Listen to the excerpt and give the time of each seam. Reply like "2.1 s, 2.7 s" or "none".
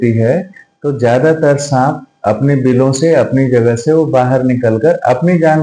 none